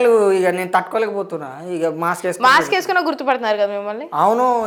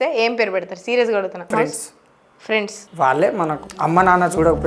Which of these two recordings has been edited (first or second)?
second